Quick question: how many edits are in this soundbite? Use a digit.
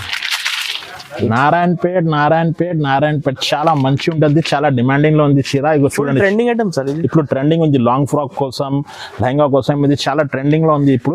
1